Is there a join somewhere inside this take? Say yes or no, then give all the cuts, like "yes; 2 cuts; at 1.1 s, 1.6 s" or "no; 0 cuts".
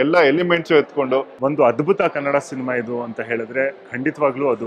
yes; 1 cut; at 1.3 s